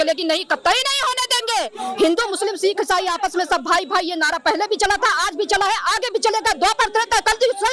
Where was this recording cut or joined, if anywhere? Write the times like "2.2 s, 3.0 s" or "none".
none